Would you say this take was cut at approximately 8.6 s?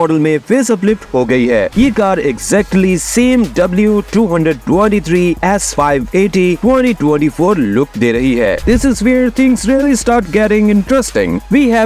yes; 1 cut; at 8.6 s

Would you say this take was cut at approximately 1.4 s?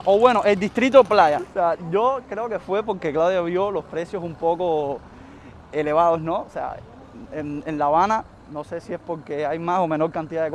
yes; 1 cut; at 1.4 s

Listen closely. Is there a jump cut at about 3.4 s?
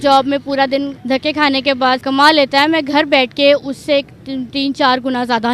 no; 2 cuts; at 1.0 s, 2.0 s

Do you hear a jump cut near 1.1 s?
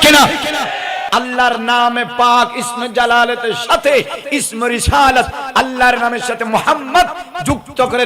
yes; 1 cut; at 1.1 s

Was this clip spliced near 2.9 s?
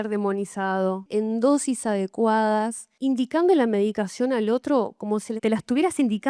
yes; 3 cuts; at 1.1 s, 2.9 s, 5.3 s

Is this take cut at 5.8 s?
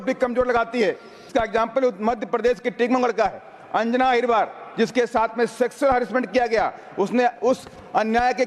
no; 1 cut; at 1.3 s

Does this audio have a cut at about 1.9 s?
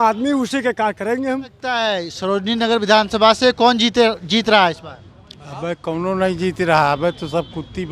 yes; 1 cut; at 1.9 s

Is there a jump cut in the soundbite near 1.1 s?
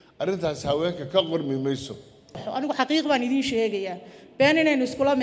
no; 1 cut; at 2.4 s

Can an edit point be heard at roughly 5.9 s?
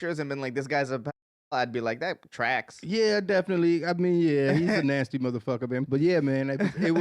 yes; 1 cut; at 5.9 s

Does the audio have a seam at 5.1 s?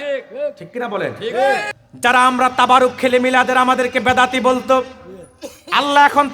no; 1 cut; at 1.7 s

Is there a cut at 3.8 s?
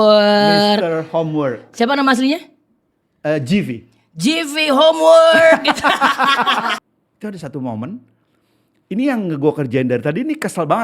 no; 1 cut; at 6.8 s

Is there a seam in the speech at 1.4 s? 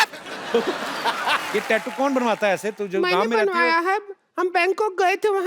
yes; 1 cut; at 1.4 s

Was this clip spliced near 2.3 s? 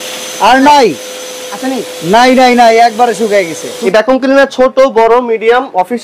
no; 1 cut; at 3.8 s

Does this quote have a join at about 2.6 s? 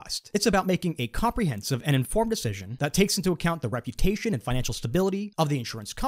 yes; 1 cut; at 2.6 s

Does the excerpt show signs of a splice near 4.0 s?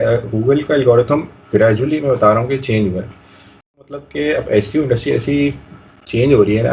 yes; 1 cut; at 4.0 s

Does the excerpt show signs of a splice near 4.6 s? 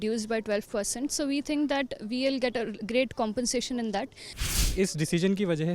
yes; 1 cut; at 4.6 s

